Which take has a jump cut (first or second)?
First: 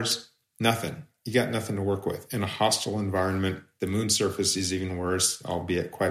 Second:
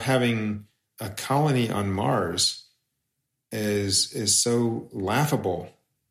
first